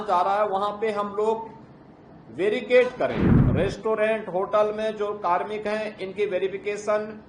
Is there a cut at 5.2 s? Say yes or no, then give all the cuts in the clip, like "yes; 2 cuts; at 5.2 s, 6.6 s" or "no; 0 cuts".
no; 1 cut; at 3.4 s